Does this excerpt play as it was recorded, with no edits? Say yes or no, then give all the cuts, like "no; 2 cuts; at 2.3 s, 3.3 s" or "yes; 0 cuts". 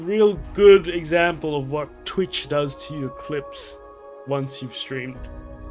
yes; 0 cuts